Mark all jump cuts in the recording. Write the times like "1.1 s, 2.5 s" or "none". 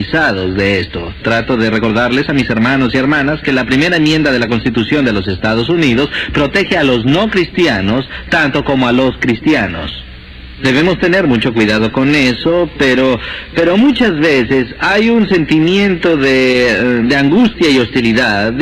8.5 s

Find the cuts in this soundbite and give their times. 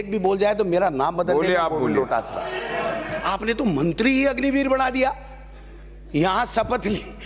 3.1 s

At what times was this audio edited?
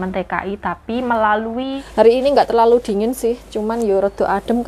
1.7 s

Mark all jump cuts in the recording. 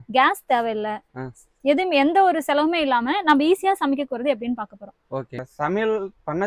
5.5 s

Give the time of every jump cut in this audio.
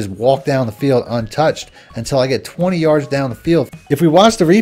3.7 s

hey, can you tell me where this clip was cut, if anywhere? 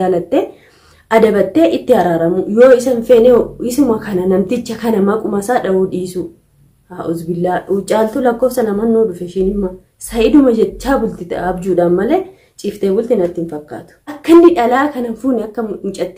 14.2 s

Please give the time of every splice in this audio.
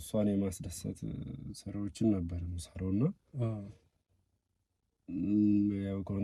none

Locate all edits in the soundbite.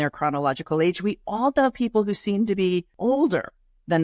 2.9 s

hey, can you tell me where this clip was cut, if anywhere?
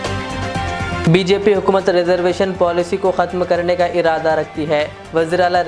0.9 s

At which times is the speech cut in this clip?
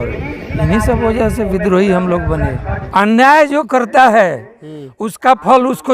2.7 s

